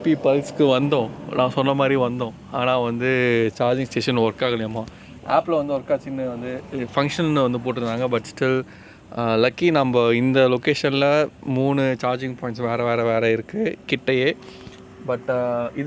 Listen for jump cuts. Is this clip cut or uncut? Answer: uncut